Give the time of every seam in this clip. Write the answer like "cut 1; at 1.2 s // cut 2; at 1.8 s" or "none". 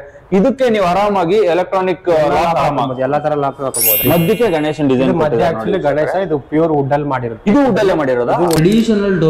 cut 1; at 4.0 s // cut 2; at 8.6 s